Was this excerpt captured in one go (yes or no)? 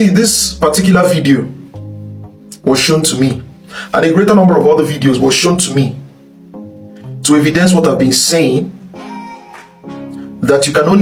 yes